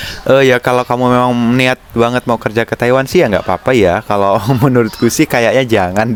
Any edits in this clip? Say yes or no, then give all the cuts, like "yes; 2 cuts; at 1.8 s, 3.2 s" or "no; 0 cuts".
no; 0 cuts